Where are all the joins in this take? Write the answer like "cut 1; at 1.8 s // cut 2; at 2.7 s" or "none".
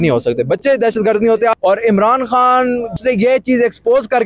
cut 1; at 1.6 s // cut 2; at 2.9 s